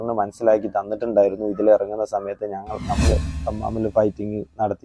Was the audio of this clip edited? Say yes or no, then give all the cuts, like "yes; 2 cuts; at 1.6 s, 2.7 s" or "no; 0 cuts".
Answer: yes; 1 cut; at 3.1 s